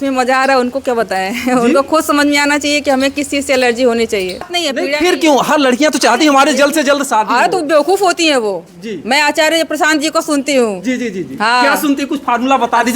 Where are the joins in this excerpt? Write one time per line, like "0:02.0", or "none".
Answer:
0:04.5